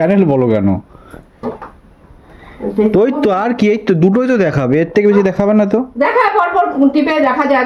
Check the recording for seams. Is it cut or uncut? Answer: uncut